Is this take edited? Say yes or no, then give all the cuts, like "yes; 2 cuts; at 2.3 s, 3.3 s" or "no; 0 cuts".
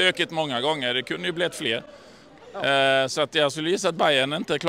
no; 0 cuts